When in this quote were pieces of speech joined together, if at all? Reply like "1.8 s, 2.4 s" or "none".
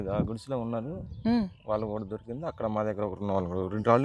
none